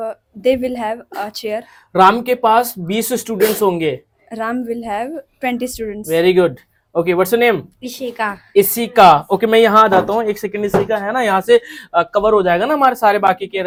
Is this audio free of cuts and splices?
yes; 0 cuts

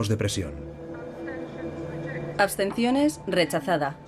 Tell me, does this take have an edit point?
yes; 1 cut; at 2.0 s

